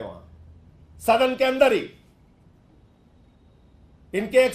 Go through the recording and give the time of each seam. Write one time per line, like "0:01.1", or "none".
none